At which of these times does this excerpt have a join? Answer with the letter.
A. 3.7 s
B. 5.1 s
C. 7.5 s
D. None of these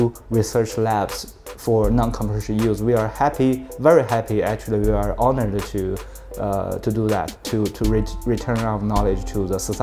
C